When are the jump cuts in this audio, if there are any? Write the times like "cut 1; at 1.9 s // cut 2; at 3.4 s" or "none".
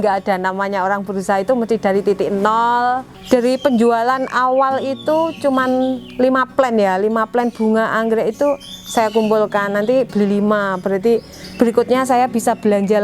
cut 1; at 3.1 s